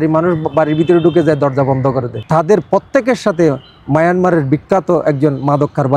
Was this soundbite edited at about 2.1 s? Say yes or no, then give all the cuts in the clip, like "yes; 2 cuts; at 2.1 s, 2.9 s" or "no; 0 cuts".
yes; 1 cut; at 2.1 s